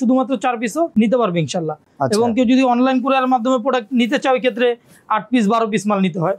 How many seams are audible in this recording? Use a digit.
0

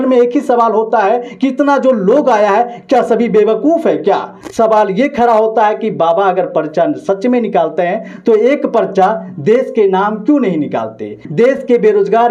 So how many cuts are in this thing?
2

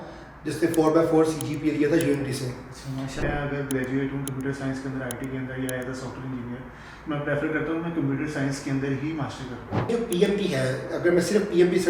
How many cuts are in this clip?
2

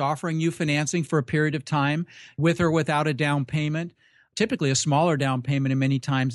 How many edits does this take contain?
2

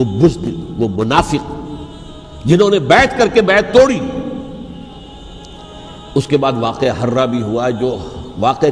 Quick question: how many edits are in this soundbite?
1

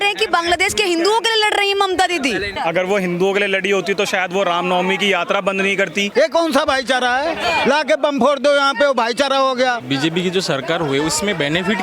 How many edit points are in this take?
3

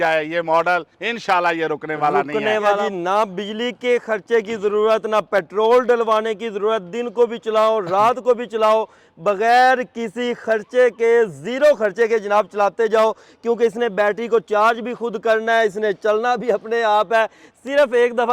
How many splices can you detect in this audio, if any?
1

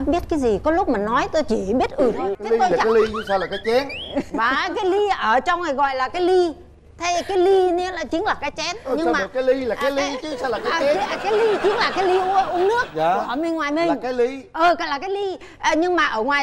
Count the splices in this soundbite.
1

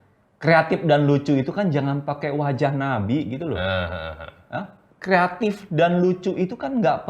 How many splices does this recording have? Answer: 1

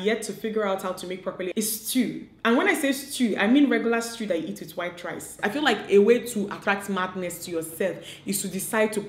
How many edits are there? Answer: 2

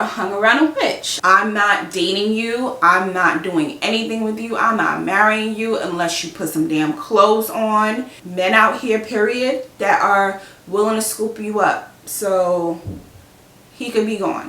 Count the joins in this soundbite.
2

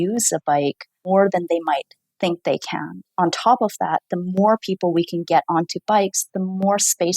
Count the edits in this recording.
2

